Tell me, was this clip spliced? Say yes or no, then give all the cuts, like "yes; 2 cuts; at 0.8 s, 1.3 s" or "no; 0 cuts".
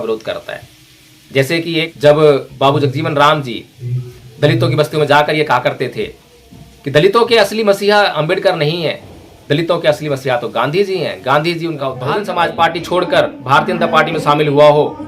yes; 2 cuts; at 1.9 s, 11.9 s